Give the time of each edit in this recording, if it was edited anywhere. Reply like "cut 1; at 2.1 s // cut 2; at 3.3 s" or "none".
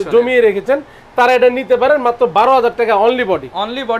none